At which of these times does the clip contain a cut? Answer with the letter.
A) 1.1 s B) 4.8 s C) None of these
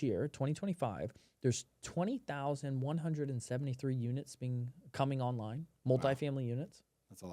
C